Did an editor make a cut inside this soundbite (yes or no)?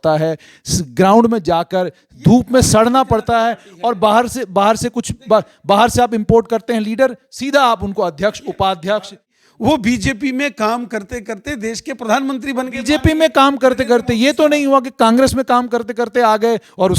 yes